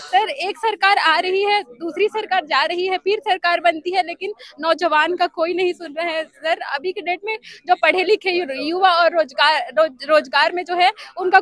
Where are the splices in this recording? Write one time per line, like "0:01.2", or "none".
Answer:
none